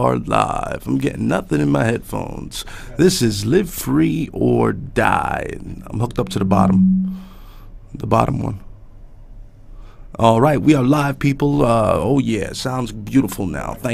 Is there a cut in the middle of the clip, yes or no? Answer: no